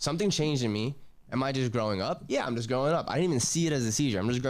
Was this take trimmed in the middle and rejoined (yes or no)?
no